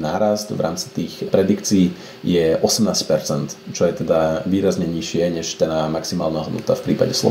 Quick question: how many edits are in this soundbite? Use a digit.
0